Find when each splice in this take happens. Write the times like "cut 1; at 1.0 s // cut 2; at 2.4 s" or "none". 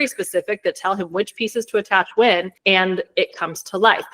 cut 1; at 2.5 s